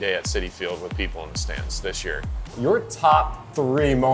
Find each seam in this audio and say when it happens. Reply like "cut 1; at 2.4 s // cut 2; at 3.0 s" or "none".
cut 1; at 2.5 s